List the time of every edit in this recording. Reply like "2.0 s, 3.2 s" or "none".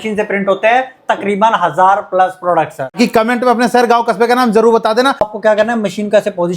3.0 s, 5.3 s